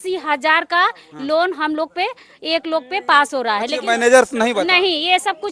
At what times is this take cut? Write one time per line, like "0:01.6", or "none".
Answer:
none

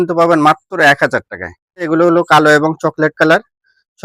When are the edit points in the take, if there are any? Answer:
0:01.9

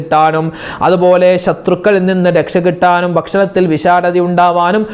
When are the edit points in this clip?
none

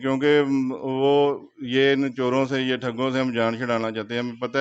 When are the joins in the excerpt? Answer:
none

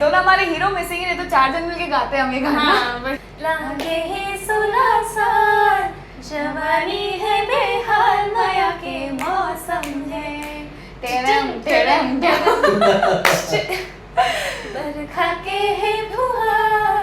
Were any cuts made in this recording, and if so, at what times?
0:03.3

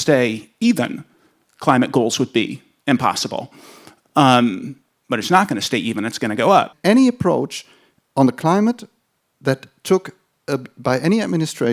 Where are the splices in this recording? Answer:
0:06.7

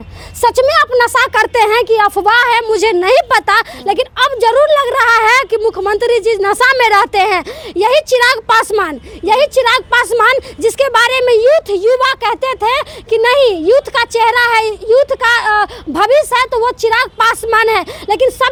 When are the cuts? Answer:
none

